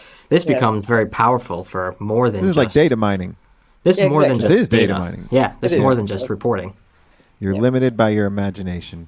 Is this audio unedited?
no; 1 cut; at 7.2 s

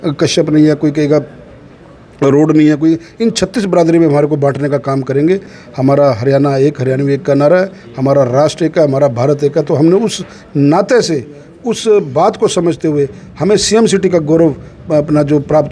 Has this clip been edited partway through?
no; 0 cuts

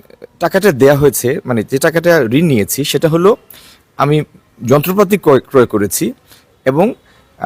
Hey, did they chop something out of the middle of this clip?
no; 0 cuts

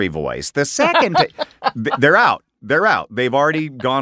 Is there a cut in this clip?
no; 0 cuts

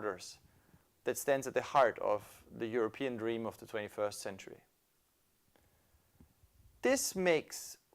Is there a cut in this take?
yes; 1 cut; at 3.7 s

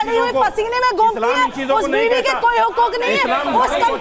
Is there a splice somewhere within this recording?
no; 0 cuts

